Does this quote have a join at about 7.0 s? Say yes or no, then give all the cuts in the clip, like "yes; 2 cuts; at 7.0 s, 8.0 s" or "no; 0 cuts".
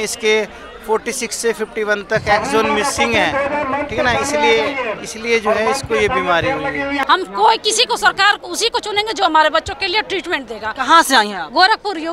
yes; 1 cut; at 7.0 s